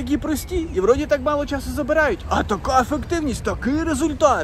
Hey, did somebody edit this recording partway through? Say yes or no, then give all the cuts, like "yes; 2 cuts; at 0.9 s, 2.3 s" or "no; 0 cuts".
no; 0 cuts